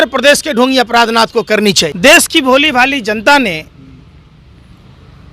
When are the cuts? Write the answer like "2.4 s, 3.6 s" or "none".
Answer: 1.9 s